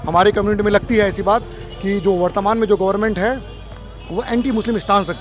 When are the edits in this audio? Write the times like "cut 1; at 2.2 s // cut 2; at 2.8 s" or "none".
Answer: none